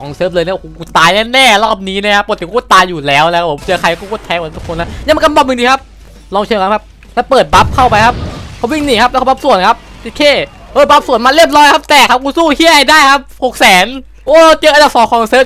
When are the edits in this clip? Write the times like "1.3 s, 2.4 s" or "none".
14.1 s

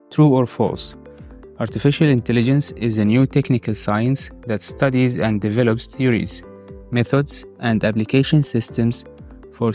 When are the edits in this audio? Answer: none

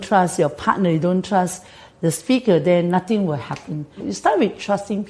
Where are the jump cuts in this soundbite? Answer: 4.1 s

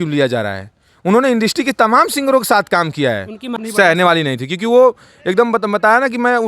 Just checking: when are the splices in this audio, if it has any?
3.5 s

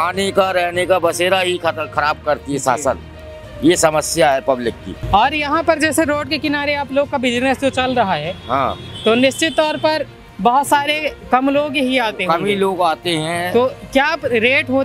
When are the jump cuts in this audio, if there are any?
none

